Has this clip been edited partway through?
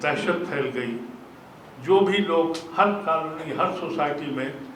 no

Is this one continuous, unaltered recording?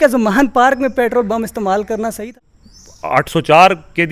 no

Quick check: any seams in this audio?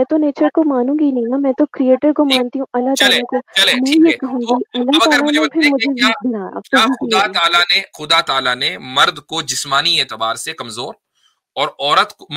no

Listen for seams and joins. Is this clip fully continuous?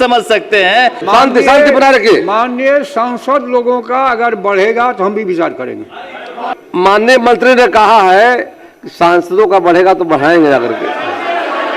no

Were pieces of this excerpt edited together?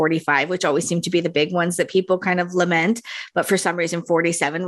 no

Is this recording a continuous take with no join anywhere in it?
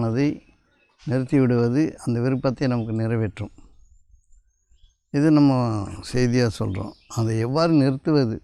yes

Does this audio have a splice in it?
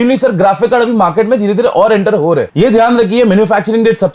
no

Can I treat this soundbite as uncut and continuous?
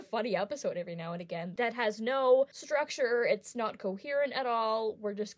no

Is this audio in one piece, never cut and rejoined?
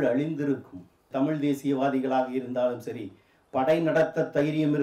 no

